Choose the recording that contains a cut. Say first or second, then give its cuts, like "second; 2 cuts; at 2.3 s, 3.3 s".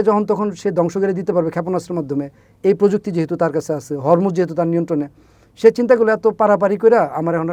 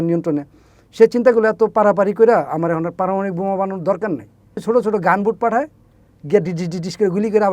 second; 1 cut; at 4.6 s